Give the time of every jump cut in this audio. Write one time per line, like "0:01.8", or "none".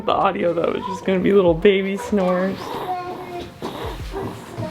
0:02.6